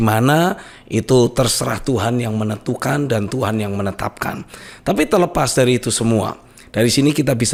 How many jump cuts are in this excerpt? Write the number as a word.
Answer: zero